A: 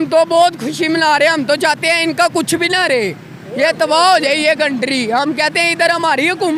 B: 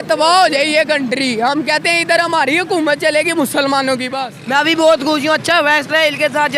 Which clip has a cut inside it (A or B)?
B